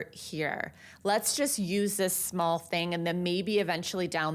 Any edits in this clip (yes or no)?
no